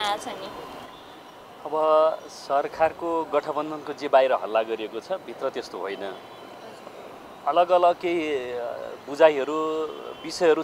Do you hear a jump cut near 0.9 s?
no; 0 cuts

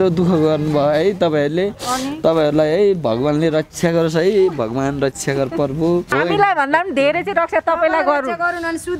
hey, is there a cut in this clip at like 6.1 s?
yes; 1 cut; at 6.1 s

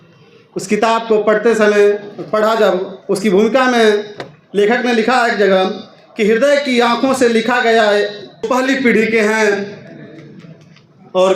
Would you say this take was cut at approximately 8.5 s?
yes; 1 cut; at 8.5 s

